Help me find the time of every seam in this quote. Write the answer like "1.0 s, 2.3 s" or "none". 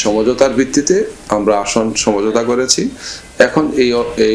none

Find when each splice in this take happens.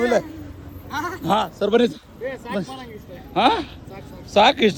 none

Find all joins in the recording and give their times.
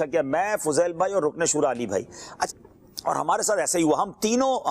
2.5 s

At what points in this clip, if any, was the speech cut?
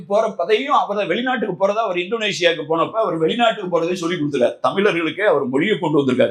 none

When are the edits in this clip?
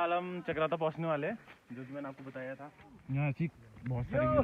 2.9 s

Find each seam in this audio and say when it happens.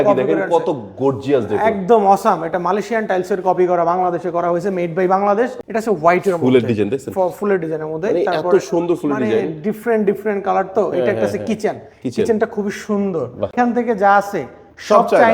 5.6 s, 13.5 s

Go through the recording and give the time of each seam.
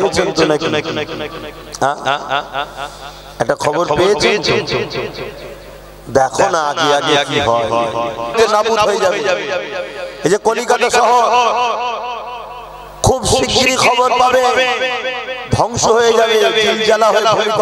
8.3 s

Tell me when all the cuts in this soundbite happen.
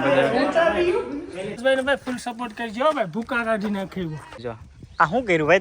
1.6 s, 4.4 s

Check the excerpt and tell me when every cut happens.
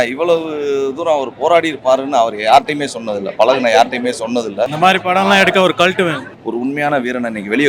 4.7 s, 6.3 s

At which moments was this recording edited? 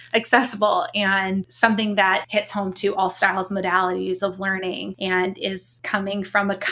1.5 s, 2.3 s, 4.9 s, 5.7 s

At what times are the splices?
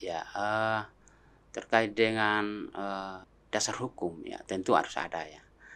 3.3 s

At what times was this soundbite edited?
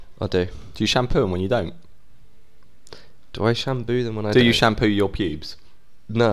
none

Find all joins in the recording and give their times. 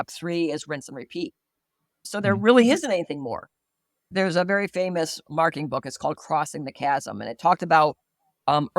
2.1 s

